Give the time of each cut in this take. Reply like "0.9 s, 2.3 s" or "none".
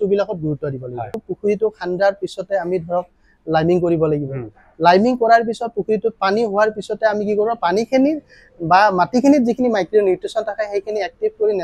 1.2 s